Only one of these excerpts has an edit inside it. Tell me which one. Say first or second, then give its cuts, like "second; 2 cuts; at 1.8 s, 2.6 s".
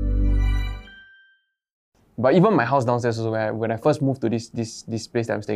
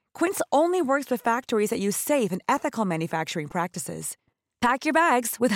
first; 1 cut; at 1.9 s